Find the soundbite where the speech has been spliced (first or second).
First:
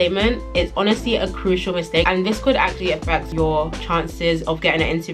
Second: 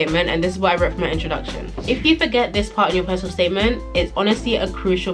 second